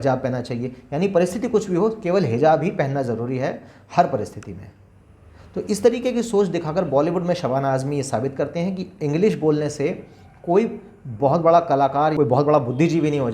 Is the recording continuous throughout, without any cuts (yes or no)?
no